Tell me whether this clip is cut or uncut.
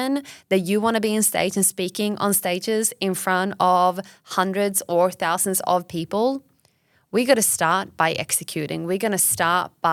uncut